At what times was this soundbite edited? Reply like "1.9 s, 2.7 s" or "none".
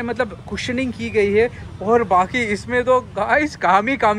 none